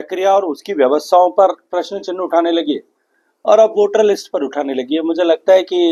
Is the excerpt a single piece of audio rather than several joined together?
yes; 0 cuts

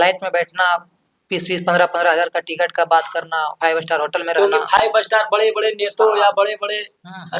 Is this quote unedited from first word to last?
yes; 0 cuts

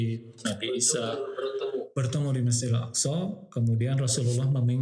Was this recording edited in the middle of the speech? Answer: no; 0 cuts

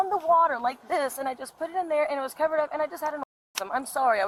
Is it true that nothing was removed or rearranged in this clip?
yes; 0 cuts

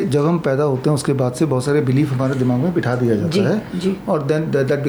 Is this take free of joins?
yes; 0 cuts

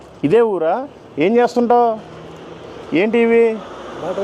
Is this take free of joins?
yes; 0 cuts

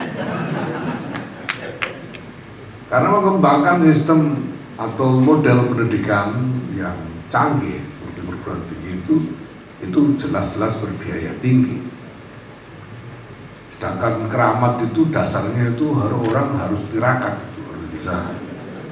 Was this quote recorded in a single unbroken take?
no; 1 cut; at 2.3 s

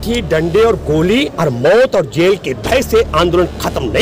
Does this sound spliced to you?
no; 0 cuts

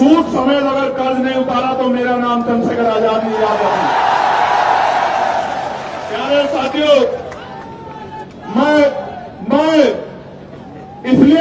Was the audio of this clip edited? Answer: no; 0 cuts

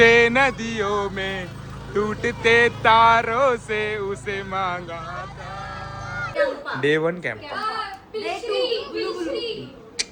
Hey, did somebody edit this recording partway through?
yes; 1 cut; at 6.4 s

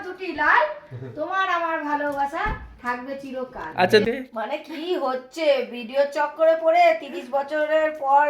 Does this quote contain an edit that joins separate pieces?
yes; 1 cut; at 4.0 s

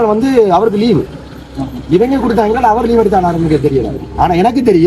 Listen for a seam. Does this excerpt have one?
no; 0 cuts

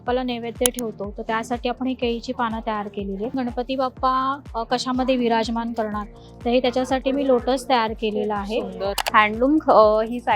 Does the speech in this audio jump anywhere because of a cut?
yes; 2 cuts; at 3.3 s, 9.0 s

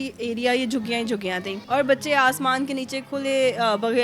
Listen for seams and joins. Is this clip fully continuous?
no; 1 cut; at 1.5 s

